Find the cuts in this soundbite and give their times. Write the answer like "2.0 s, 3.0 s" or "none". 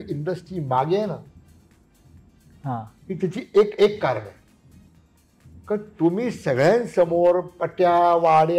none